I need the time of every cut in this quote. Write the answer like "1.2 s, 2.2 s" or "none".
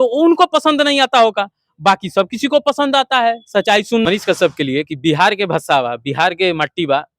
4.1 s